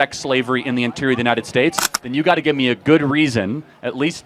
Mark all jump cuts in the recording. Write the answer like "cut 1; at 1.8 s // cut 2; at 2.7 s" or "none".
cut 1; at 1.9 s